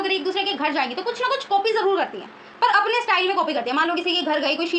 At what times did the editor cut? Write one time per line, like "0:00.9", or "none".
none